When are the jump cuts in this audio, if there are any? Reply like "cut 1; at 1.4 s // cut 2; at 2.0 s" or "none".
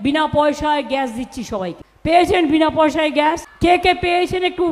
cut 1; at 1.8 s // cut 2; at 3.5 s

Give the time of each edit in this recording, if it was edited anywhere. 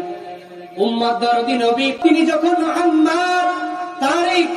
cut 1; at 2.0 s

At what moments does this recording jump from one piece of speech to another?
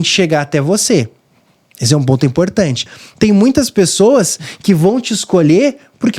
cut 1; at 2.9 s

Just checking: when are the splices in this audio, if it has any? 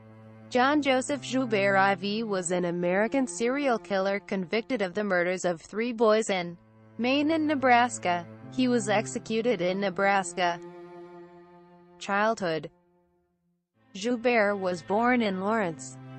none

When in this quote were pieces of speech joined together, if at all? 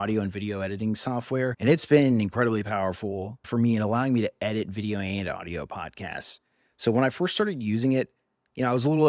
cut 1; at 1.6 s

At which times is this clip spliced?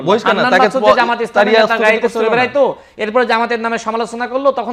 none

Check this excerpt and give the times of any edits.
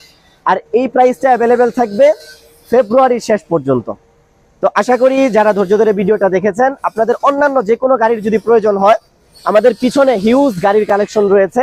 none

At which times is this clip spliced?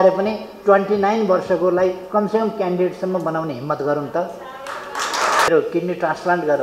cut 1; at 5.5 s

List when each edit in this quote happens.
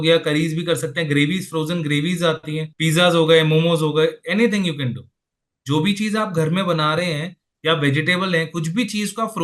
cut 1; at 2.7 s

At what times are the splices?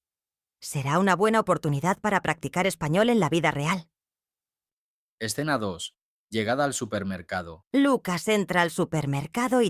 cut 1; at 7.6 s

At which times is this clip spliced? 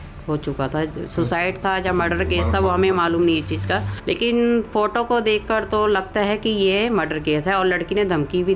cut 1; at 3.9 s

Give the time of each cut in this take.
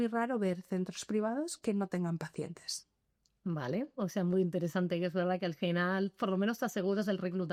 none

